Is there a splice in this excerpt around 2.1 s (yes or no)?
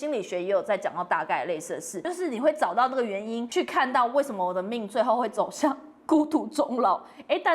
yes